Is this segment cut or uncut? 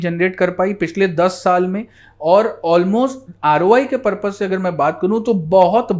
uncut